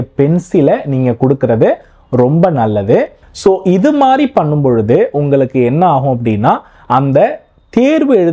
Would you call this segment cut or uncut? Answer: cut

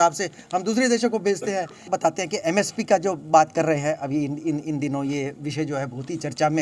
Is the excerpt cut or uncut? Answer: cut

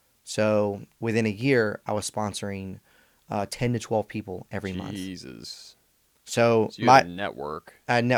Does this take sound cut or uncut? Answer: uncut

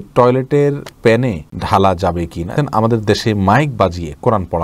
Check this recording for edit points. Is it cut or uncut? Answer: cut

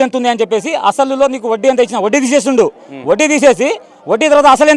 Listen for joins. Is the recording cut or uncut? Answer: uncut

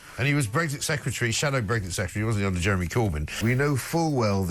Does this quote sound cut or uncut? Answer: cut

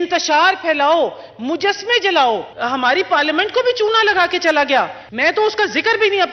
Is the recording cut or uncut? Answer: cut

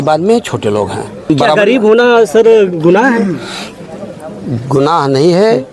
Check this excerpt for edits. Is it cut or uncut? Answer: cut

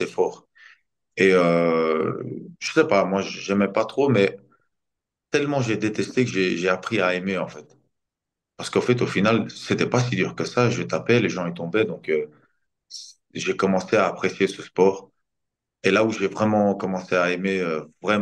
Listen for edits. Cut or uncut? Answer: uncut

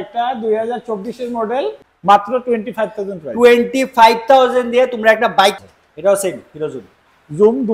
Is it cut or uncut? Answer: cut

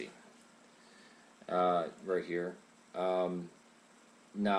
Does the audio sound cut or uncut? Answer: cut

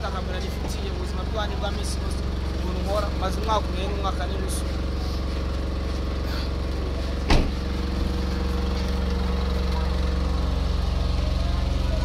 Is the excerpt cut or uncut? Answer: uncut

